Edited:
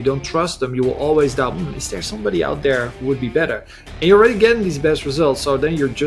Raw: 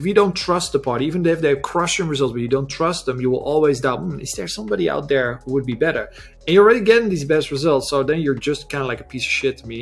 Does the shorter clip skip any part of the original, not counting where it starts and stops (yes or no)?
no